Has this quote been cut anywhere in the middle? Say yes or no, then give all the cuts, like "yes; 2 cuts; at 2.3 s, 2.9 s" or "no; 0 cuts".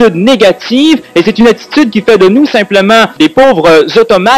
no; 0 cuts